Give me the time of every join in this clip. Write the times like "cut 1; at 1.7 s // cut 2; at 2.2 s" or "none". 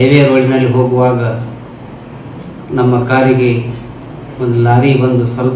cut 1; at 3.5 s